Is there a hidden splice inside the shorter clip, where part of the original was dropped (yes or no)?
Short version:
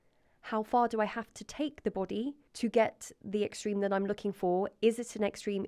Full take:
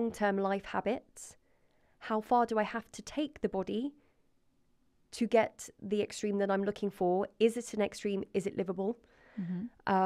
yes